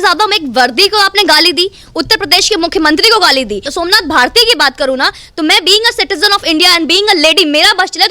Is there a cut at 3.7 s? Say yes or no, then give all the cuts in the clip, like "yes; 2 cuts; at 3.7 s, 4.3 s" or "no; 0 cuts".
yes; 1 cut; at 3.7 s